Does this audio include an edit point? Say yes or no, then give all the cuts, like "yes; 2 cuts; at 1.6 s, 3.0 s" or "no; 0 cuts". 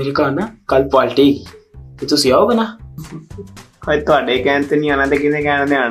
no; 0 cuts